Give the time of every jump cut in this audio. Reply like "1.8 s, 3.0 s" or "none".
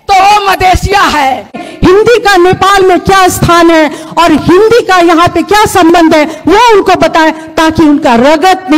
1.7 s